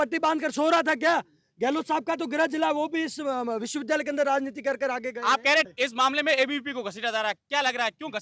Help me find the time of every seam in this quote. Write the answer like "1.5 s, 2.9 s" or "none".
5.7 s